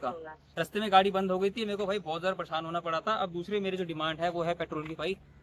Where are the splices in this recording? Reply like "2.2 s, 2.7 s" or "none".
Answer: none